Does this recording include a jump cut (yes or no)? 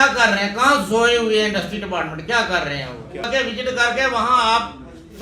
yes